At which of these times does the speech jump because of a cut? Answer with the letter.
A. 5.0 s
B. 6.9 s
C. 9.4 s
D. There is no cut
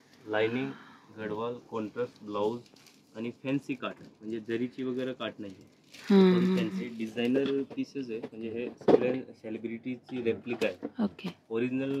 B